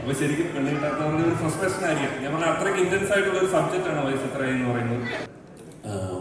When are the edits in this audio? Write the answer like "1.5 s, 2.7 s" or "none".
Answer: 5.3 s